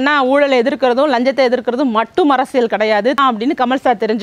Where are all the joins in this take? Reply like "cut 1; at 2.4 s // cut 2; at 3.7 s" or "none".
cut 1; at 3.2 s